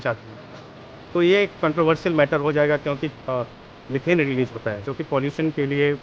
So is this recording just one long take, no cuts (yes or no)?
no